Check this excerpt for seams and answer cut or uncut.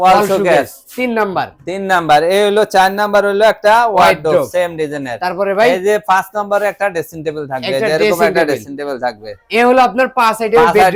uncut